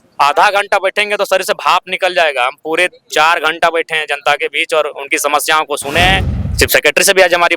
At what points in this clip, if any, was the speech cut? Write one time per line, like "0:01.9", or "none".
0:06.4